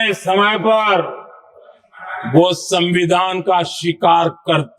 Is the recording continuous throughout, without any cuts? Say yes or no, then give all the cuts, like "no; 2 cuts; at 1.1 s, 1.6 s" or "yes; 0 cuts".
yes; 0 cuts